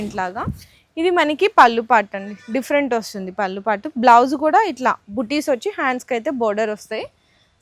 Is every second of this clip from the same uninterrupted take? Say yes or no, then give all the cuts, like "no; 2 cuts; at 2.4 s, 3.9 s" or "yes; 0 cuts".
yes; 0 cuts